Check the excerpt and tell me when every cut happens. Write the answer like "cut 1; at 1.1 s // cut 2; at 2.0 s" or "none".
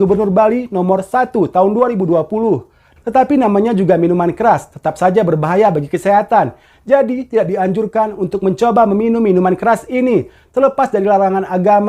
cut 1; at 2.8 s